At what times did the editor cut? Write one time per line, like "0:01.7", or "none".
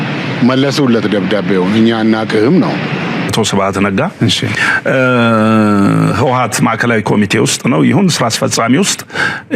0:03.3